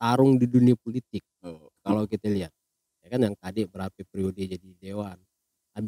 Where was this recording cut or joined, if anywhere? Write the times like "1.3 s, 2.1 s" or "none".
none